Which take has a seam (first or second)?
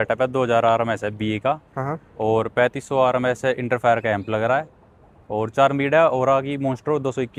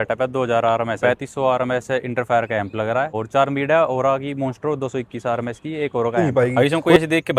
second